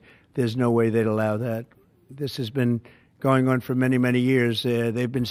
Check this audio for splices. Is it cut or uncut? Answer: uncut